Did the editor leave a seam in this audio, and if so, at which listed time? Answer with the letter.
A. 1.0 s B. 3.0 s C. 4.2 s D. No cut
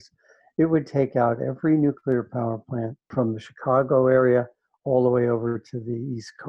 B